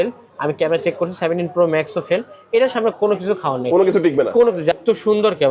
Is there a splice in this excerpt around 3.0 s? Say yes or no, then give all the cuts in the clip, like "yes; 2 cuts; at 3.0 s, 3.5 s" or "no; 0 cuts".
yes; 2 cuts; at 3.0 s, 4.8 s